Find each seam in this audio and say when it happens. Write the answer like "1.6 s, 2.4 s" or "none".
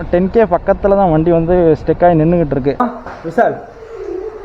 2.8 s

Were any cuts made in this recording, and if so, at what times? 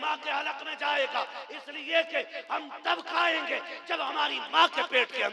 none

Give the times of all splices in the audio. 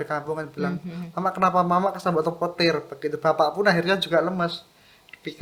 none

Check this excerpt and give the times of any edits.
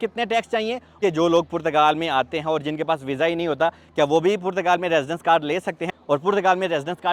1.0 s, 5.8 s

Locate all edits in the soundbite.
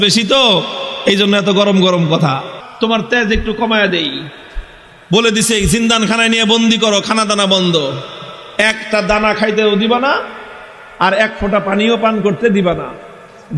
2.6 s

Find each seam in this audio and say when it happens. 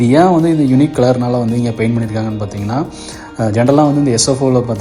none

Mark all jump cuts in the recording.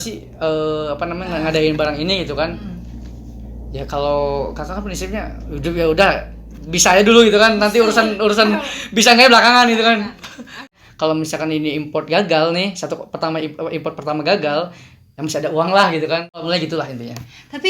10.7 s, 16.4 s

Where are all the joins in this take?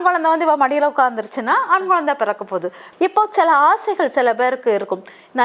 2.8 s

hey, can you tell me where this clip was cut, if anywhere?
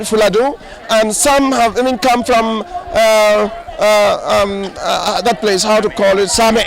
none

